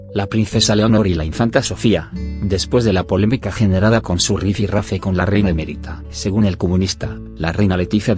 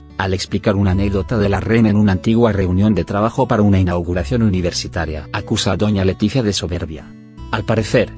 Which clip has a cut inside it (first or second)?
second